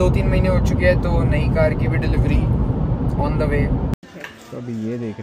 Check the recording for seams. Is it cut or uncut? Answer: cut